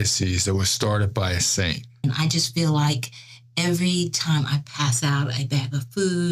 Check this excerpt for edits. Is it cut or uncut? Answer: cut